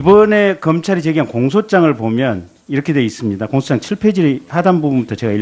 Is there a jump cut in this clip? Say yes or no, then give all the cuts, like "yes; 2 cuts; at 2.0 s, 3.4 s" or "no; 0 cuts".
yes; 1 cut; at 1.0 s